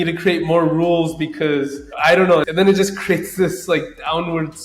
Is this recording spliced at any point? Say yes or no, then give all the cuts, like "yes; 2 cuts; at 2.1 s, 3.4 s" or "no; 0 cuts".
yes; 1 cut; at 1.8 s